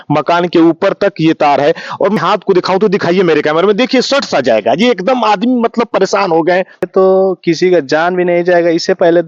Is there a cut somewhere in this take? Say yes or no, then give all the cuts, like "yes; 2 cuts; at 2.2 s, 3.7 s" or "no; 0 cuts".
yes; 2 cuts; at 2.2 s, 6.9 s